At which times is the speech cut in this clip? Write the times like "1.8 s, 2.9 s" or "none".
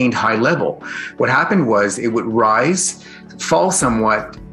none